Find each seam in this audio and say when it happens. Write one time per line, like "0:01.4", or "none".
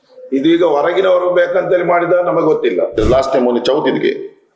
0:03.0